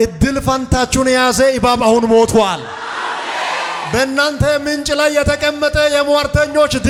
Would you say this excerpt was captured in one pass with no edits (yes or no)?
yes